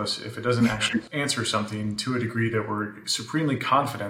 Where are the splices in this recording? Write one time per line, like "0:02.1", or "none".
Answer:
0:01.1